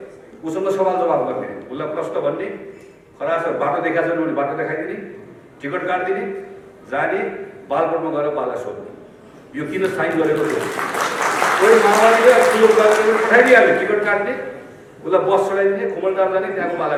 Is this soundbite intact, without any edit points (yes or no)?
yes